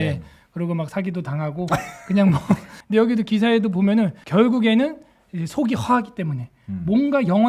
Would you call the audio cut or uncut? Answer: cut